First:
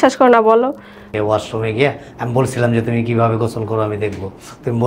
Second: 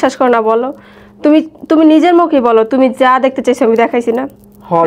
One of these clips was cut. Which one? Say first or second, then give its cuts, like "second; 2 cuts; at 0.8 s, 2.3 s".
first; 1 cut; at 1.1 s